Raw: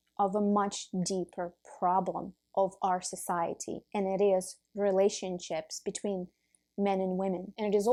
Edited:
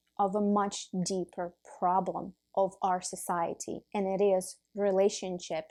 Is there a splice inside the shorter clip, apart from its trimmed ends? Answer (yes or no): no